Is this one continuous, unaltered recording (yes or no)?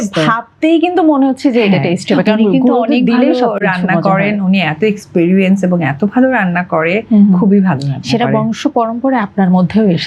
yes